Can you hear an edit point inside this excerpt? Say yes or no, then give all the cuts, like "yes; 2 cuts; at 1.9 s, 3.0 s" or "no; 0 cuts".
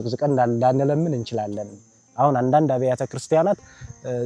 no; 0 cuts